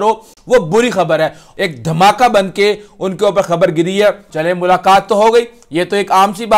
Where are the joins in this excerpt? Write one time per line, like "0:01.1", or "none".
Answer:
0:01.4
0:04.2